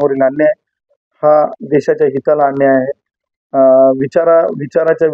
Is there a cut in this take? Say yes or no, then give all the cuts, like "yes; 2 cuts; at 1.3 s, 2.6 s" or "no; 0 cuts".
no; 0 cuts